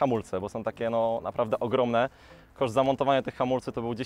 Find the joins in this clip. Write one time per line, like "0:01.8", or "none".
none